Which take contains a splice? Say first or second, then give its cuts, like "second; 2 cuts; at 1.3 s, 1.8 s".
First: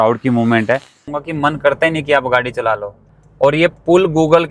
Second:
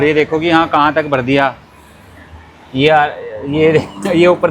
first; 2 cuts; at 1.2 s, 3.2 s